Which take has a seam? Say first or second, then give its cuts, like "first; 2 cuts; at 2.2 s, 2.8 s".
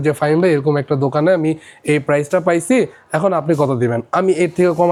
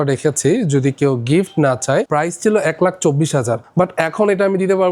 second; 2 cuts; at 2.1 s, 3.6 s